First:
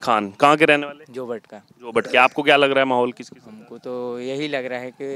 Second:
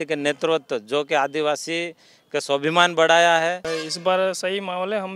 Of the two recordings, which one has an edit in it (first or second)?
second